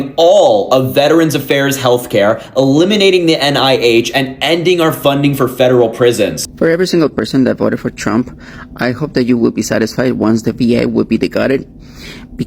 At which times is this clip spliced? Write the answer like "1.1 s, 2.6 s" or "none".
6.4 s